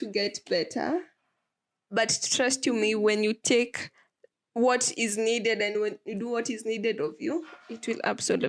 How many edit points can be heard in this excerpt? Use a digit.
0